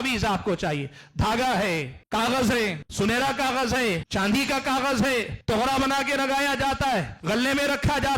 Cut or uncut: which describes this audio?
cut